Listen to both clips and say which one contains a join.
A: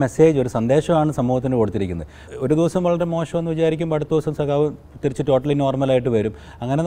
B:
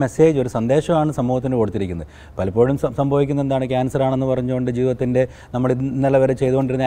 A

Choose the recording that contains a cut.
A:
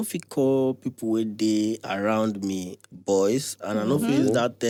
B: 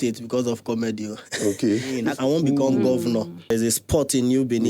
B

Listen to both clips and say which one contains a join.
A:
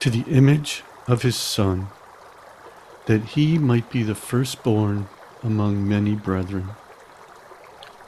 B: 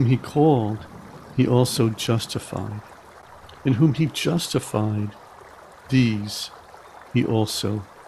A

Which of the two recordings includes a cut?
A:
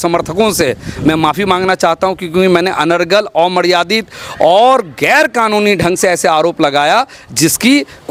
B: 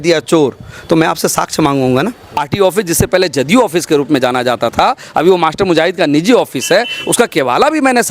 B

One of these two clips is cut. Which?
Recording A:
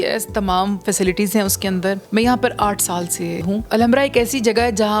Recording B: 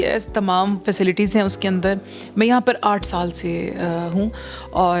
A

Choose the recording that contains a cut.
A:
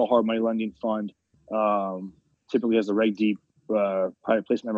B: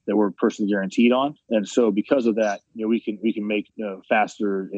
B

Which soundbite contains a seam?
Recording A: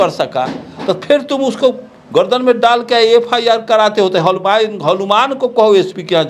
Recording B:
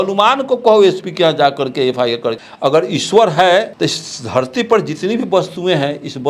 B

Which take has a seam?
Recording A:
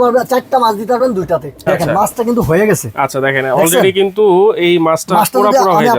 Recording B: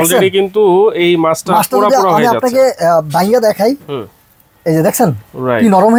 A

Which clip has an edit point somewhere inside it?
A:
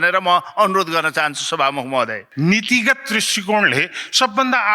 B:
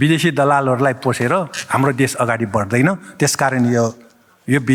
A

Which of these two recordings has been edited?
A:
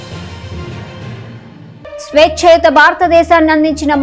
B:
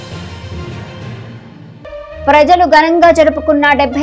A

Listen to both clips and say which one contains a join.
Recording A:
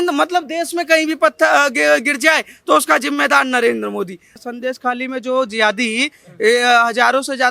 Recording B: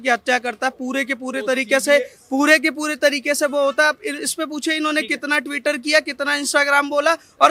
A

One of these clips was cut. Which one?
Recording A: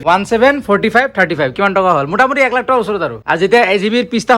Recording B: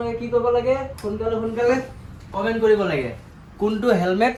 A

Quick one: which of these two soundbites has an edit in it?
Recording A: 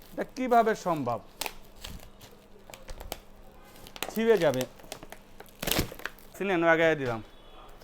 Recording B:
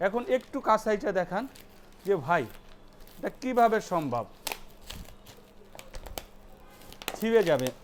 A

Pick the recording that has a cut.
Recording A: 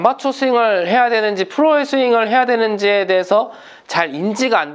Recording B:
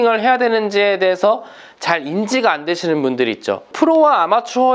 B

